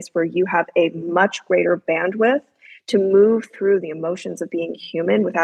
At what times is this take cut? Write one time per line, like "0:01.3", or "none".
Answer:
none